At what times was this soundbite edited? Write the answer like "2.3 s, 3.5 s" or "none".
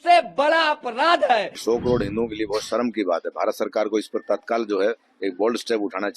1.6 s